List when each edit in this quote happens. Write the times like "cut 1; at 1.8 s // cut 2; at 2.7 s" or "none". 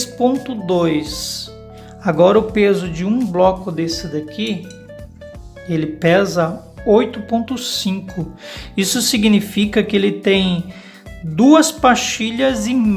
none